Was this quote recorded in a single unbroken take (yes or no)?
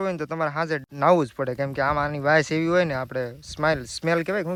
yes